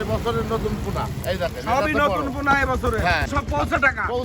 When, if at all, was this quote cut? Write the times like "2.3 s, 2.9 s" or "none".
3.3 s